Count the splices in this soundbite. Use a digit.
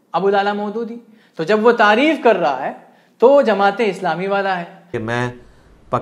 1